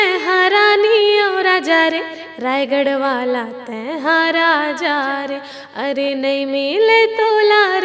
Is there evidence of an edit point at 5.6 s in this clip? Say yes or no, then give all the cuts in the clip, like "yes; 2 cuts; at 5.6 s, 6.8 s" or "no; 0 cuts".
no; 0 cuts